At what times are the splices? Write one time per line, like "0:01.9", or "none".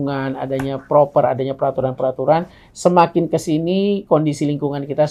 none